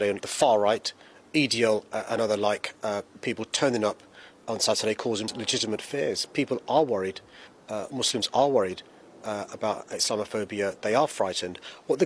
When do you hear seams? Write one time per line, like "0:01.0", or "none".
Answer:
0:05.3